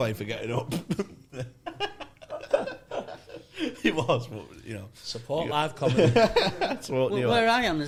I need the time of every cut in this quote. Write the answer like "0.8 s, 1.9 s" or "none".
none